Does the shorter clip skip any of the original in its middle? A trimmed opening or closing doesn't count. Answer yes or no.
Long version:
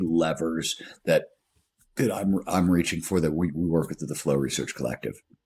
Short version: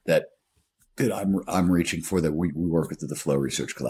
no